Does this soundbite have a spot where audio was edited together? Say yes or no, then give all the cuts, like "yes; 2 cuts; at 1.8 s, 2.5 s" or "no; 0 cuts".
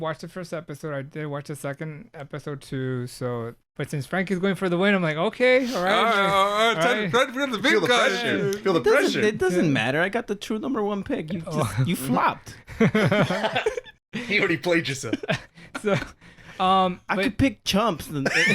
yes; 1 cut; at 3.6 s